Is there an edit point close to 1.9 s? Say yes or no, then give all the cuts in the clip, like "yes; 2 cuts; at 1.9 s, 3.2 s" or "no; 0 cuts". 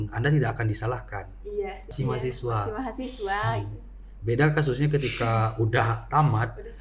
yes; 1 cut; at 1.9 s